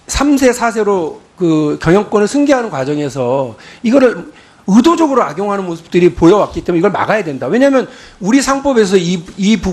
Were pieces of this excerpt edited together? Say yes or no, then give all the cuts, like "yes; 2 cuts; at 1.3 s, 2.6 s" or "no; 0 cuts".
no; 0 cuts